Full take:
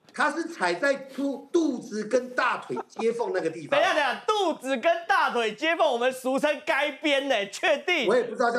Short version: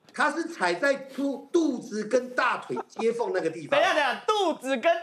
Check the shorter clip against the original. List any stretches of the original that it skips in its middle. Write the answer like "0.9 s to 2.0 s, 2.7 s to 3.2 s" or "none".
none